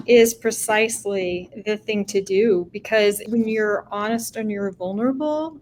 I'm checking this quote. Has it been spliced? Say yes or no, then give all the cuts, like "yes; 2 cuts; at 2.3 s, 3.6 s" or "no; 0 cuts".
yes; 1 cut; at 3.2 s